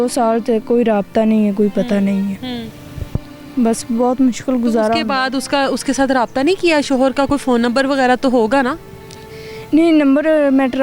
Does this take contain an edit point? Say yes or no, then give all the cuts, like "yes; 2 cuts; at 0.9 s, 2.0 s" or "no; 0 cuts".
no; 0 cuts